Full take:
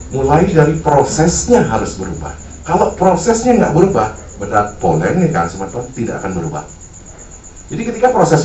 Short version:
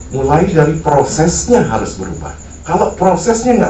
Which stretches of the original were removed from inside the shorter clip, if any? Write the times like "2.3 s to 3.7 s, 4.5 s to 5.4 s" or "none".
none